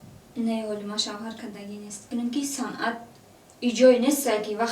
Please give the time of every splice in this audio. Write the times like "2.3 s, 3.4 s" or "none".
2.1 s